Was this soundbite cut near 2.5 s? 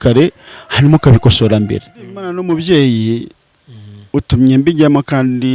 yes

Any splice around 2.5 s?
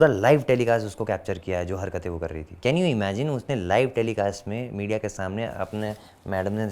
yes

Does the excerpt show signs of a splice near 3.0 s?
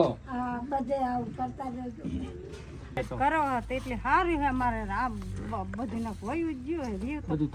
yes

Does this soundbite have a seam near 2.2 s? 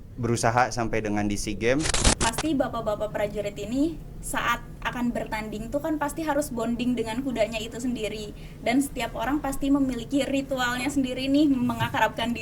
yes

